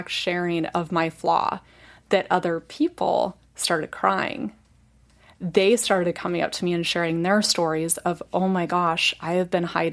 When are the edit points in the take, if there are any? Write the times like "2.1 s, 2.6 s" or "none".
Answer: none